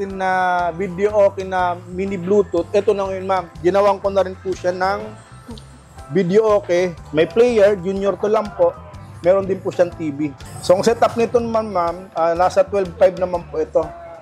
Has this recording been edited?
no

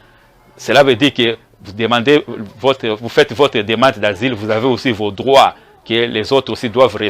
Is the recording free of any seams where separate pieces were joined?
yes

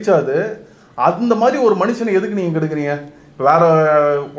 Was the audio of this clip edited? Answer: no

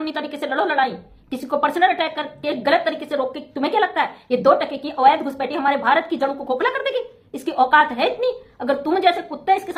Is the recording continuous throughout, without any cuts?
yes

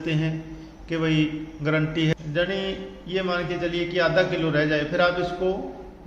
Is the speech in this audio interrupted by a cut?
yes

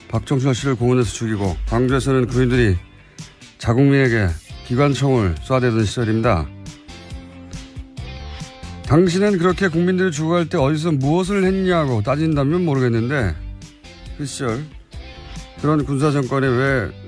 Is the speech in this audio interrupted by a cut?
no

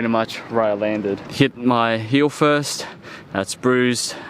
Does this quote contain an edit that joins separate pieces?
yes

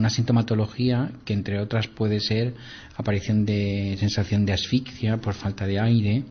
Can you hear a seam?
no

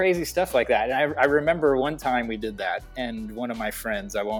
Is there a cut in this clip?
no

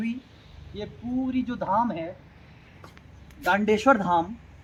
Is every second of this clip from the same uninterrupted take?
yes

